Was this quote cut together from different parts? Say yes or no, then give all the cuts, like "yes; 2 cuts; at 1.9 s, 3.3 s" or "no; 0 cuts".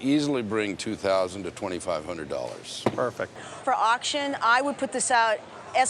yes; 1 cut; at 3.4 s